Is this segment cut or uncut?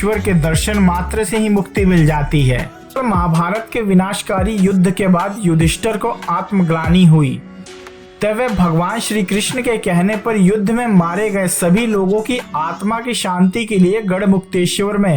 cut